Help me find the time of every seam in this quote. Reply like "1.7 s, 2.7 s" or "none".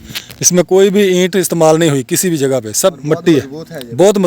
3.2 s